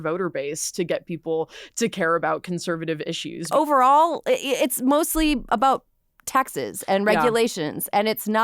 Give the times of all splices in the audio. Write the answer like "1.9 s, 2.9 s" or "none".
3.5 s

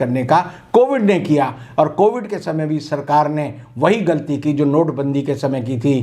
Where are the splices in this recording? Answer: none

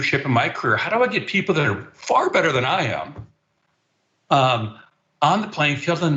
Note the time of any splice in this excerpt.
none

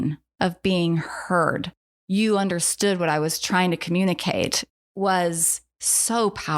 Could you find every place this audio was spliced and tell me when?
4.6 s

